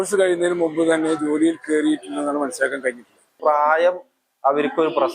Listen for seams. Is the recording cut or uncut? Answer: cut